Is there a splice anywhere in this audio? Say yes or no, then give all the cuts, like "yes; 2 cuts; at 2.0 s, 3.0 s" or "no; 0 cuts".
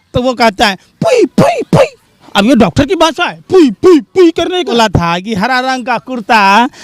yes; 1 cut; at 4.7 s